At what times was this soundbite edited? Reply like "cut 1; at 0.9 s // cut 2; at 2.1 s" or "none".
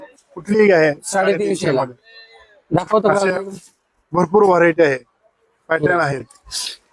none